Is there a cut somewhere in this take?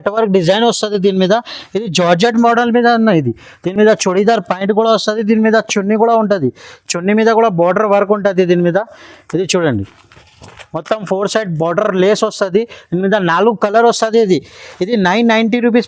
no; 0 cuts

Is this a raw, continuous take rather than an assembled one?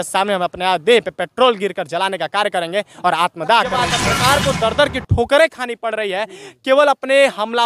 no; 1 cut; at 3.9 s

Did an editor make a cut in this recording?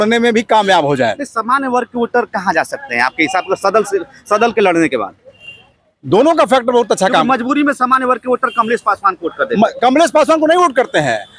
no; 0 cuts

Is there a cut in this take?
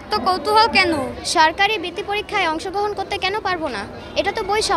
yes; 1 cut; at 1.2 s

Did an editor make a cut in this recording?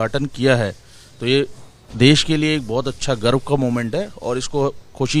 no; 0 cuts

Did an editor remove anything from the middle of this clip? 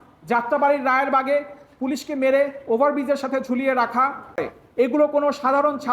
yes; 1 cut; at 4.5 s

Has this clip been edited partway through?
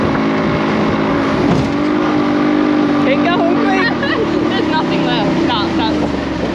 no; 0 cuts

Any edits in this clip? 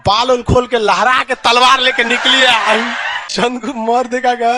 yes; 1 cut; at 3.7 s

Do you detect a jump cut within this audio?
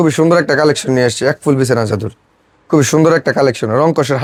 no; 0 cuts

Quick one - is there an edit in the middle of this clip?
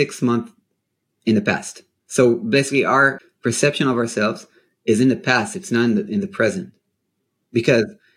yes; 1 cut; at 3.3 s

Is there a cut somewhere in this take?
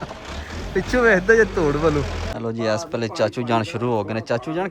yes; 1 cut; at 2.2 s

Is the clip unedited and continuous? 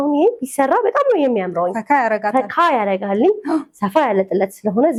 yes; 0 cuts

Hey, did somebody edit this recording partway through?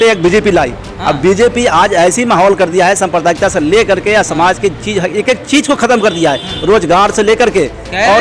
no; 0 cuts

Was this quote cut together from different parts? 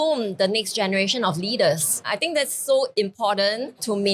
yes; 1 cut; at 2.1 s

